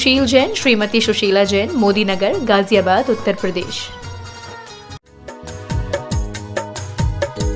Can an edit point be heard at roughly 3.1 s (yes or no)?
no